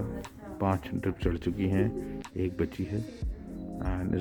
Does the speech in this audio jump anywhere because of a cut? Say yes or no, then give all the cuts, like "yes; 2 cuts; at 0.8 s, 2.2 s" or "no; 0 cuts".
no; 0 cuts